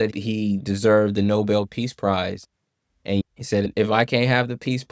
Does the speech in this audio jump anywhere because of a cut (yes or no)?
yes